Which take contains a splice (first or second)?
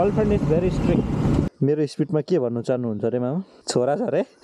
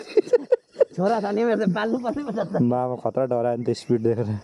first